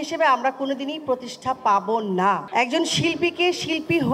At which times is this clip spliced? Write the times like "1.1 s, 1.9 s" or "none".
2.4 s